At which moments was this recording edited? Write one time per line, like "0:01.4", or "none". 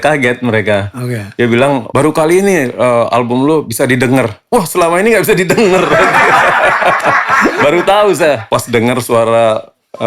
0:08.4

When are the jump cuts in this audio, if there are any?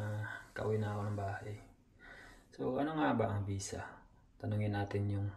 none

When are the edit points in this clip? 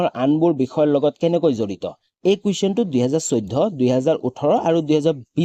none

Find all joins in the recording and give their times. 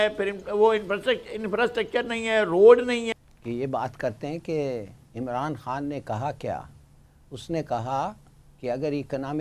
0:03.2

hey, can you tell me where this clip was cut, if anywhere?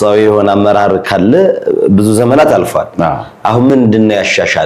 0:03.7

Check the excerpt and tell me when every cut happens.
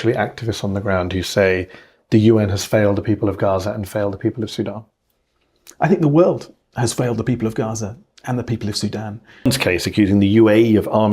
0:09.5

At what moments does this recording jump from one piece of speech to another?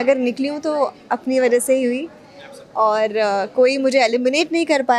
none

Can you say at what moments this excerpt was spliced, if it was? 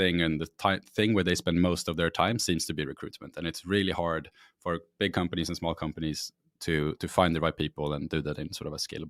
none

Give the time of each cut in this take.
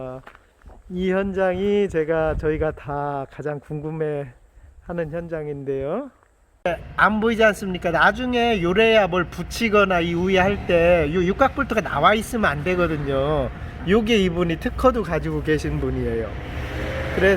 0:06.7

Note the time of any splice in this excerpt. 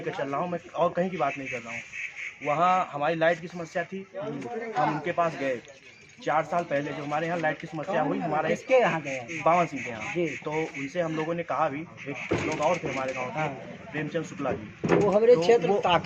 none

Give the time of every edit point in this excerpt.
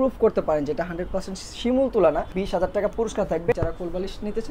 0:02.3
0:03.5

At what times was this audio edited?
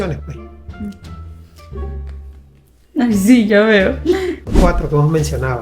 0:04.5

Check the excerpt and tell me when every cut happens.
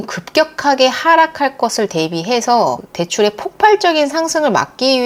0:02.9

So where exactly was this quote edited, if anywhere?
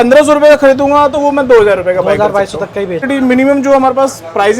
0:03.0

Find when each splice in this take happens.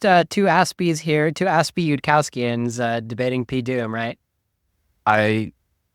none

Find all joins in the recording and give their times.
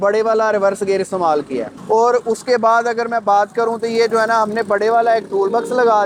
none

